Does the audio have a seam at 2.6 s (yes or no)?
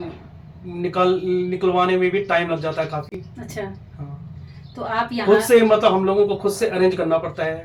no